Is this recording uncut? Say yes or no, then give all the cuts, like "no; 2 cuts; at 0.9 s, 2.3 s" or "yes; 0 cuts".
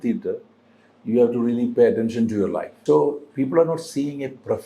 no; 1 cut; at 2.7 s